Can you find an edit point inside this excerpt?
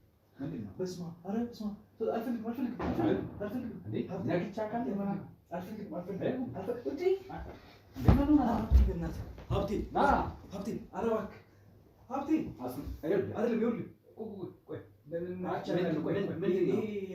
no; 0 cuts

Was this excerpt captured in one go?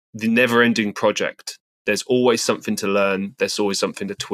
no; 1 cut; at 1.6 s

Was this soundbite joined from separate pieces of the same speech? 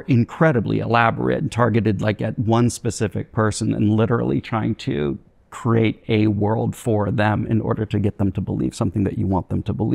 no; 0 cuts

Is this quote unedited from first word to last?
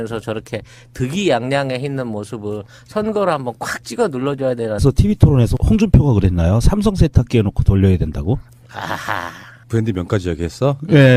yes; 0 cuts

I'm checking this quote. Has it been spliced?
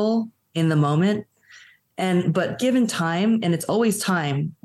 no; 0 cuts

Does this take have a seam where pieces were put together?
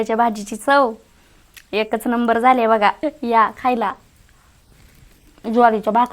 yes; 1 cut; at 3.0 s

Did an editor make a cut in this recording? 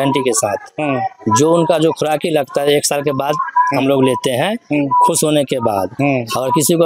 no; 0 cuts

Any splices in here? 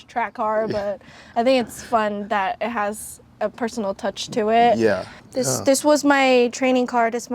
yes; 1 cut; at 5.2 s

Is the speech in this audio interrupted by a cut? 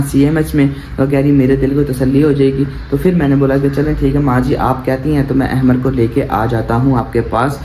no; 0 cuts

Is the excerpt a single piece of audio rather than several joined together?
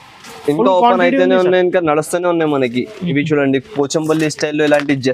yes; 0 cuts

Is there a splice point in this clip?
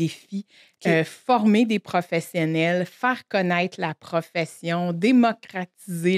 no; 0 cuts

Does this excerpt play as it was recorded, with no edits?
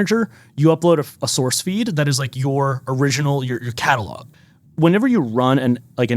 no; 1 cut; at 4.2 s

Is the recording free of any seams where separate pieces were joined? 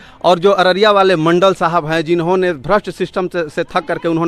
yes; 0 cuts

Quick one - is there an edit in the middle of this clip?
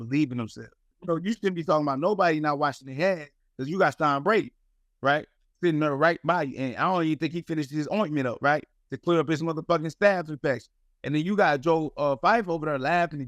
yes; 1 cut; at 0.9 s

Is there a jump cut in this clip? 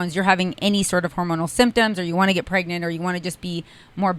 no; 0 cuts

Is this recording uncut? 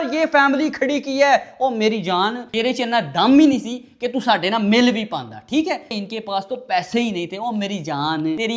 no; 1 cut; at 5.9 s

